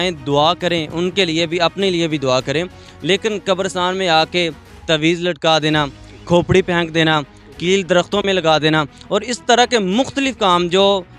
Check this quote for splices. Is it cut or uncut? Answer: uncut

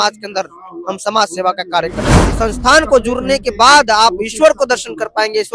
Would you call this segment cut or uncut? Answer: cut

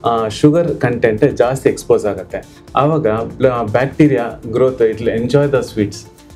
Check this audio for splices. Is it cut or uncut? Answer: uncut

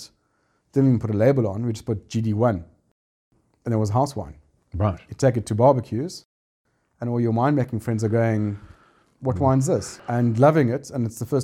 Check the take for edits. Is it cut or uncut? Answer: cut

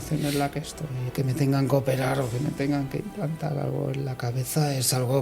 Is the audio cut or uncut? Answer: cut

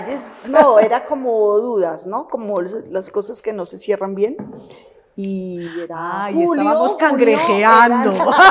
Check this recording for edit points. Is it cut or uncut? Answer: uncut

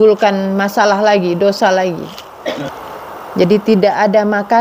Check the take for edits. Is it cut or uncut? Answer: cut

